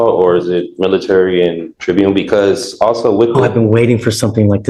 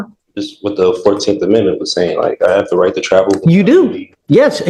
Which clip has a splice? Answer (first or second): first